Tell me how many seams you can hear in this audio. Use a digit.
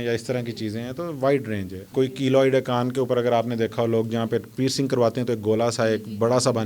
1